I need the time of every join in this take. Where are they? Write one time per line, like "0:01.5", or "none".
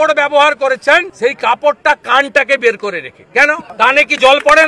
0:01.1
0:03.7